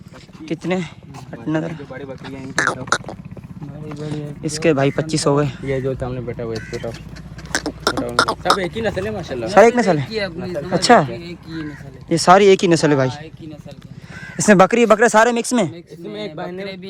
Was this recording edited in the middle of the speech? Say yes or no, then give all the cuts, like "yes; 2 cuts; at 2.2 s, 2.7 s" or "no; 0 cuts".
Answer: no; 0 cuts